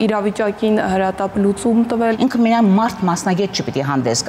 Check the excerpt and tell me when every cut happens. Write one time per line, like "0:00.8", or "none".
0:02.2